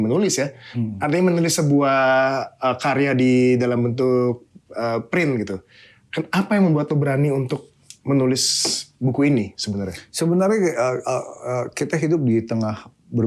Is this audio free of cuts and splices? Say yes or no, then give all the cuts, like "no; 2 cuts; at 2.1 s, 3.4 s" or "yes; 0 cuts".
yes; 0 cuts